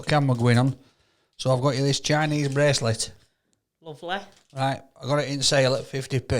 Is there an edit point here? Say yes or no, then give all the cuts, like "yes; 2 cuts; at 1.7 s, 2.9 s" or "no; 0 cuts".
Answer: no; 0 cuts